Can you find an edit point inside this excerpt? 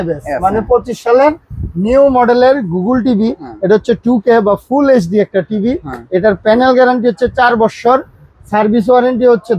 no; 0 cuts

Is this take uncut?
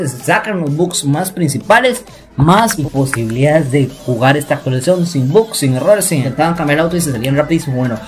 no; 2 cuts; at 2.8 s, 6.3 s

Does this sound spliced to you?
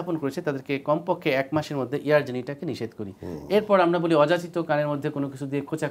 no; 0 cuts

